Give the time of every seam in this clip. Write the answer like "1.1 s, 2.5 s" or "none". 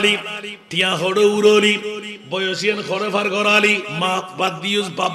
3.9 s